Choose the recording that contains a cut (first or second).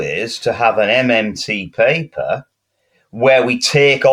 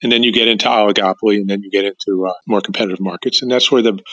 second